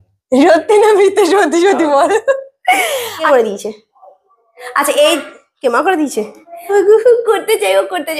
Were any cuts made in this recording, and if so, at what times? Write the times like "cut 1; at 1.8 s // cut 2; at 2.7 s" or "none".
cut 1; at 3.2 s // cut 2; at 6.7 s